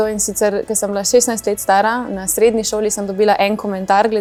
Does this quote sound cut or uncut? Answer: uncut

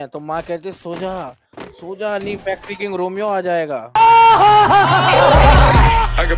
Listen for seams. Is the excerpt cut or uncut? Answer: uncut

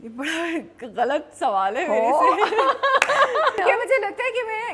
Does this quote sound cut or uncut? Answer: cut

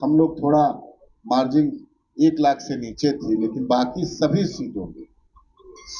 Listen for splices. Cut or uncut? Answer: uncut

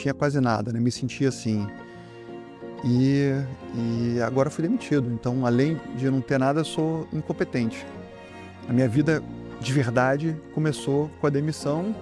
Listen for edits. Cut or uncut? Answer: uncut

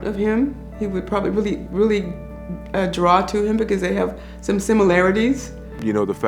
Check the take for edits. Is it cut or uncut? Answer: uncut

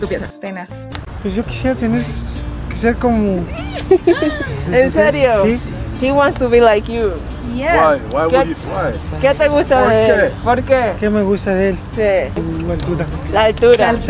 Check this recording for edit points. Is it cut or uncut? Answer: uncut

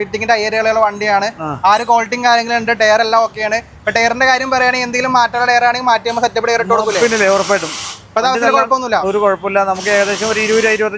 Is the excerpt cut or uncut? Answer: uncut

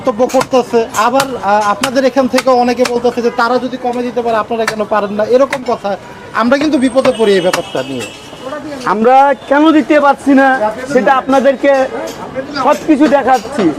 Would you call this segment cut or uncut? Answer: uncut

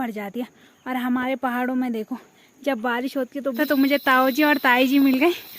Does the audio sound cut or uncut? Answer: cut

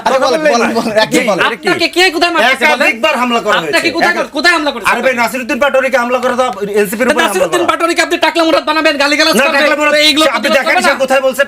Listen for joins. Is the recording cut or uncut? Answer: uncut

